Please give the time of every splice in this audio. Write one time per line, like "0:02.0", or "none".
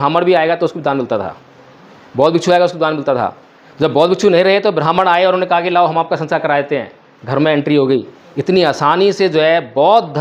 none